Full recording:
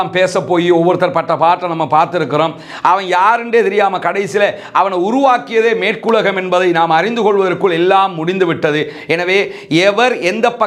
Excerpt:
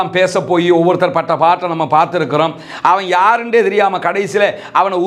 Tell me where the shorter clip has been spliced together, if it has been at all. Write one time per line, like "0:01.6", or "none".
none